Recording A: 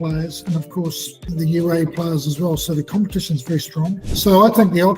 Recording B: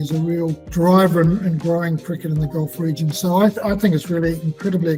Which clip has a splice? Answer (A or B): A